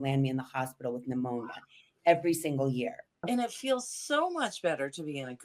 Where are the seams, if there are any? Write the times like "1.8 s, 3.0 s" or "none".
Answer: 3.1 s